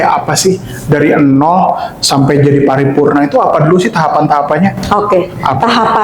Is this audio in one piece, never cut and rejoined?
yes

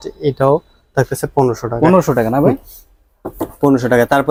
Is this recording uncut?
yes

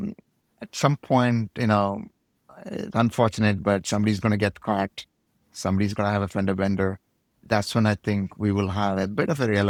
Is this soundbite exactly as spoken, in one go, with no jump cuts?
yes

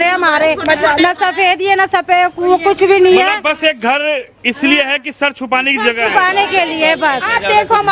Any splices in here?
no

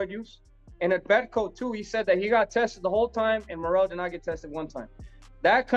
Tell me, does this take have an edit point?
no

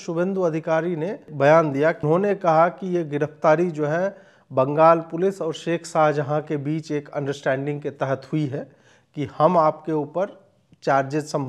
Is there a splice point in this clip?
yes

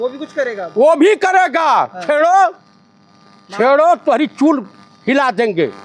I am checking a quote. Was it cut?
no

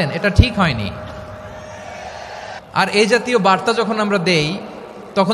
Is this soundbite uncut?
no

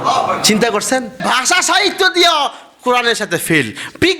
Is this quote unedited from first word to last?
no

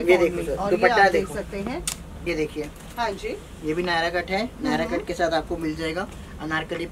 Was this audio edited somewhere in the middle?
yes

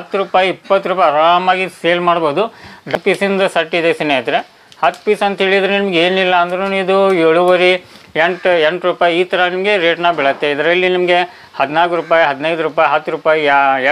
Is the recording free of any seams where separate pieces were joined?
no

